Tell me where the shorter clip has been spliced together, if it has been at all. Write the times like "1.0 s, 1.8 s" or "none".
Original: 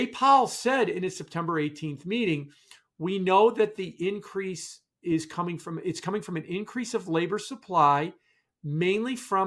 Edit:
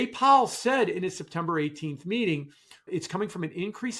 2.8 s